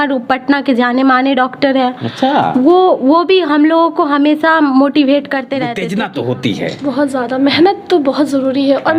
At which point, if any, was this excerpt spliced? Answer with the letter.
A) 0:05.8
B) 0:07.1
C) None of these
A